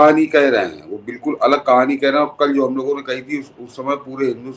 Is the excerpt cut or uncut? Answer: uncut